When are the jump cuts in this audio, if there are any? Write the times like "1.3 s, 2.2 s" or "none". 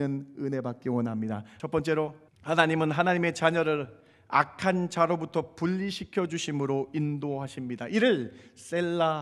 1.5 s, 2.3 s